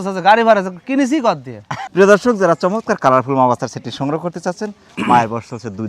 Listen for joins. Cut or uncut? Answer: uncut